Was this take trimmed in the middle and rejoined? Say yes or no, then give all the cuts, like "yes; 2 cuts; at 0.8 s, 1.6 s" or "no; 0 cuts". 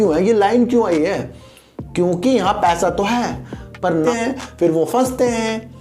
yes; 1 cut; at 4.0 s